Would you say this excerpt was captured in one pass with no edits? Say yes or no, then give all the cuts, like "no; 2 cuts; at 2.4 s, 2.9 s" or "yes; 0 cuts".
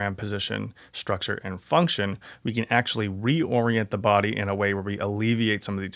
yes; 0 cuts